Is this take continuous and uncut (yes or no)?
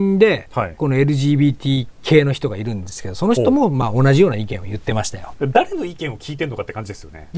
no